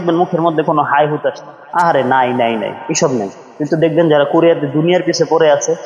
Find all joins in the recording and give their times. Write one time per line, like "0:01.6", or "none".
none